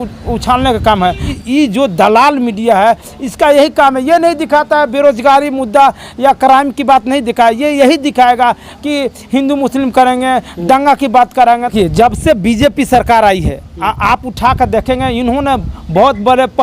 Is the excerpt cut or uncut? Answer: cut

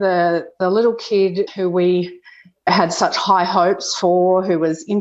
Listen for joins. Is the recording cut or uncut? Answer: cut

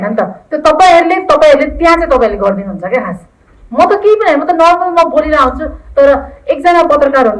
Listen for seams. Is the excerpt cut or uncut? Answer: uncut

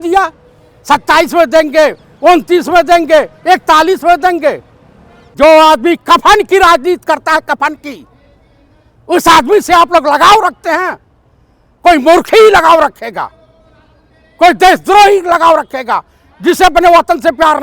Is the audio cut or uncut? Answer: cut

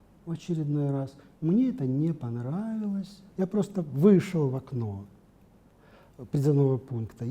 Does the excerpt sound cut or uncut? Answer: cut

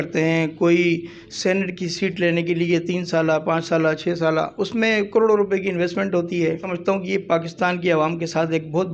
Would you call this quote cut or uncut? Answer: cut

